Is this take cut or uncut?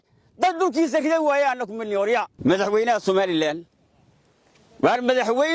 cut